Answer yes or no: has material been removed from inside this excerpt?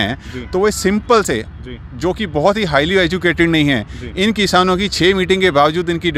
no